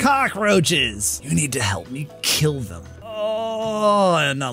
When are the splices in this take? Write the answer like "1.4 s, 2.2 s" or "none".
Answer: 1.2 s, 3.0 s